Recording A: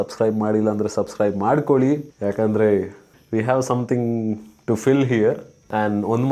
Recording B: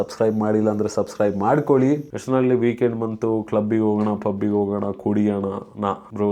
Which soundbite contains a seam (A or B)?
B